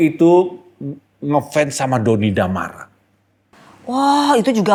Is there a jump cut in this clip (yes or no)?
no